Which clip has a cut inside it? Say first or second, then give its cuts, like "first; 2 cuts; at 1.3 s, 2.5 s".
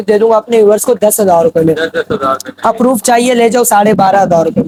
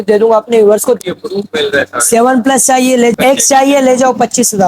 second; 2 cuts; at 1.0 s, 3.1 s